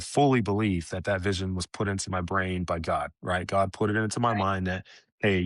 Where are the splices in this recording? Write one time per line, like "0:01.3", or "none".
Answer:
none